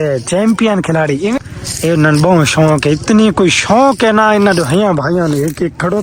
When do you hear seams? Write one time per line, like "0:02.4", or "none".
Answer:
0:01.4